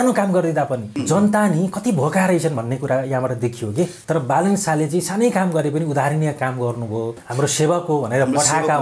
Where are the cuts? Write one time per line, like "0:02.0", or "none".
0:00.9
0:04.0
0:07.2